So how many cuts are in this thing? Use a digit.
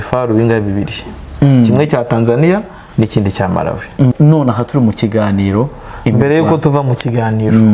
1